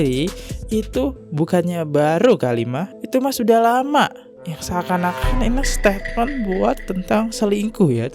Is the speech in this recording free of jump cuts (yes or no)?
yes